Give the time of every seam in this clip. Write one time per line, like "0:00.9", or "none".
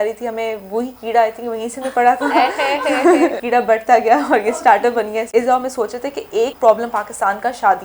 0:03.4
0:05.3
0:06.5